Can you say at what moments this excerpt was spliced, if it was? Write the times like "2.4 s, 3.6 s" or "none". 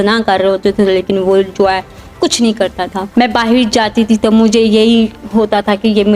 3.0 s